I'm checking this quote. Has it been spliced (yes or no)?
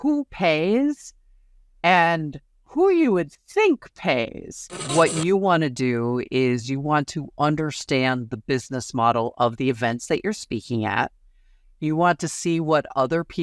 yes